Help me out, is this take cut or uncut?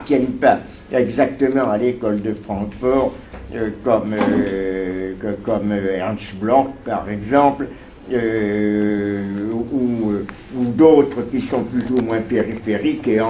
cut